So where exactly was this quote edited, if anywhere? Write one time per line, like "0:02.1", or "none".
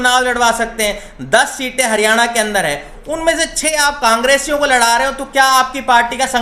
none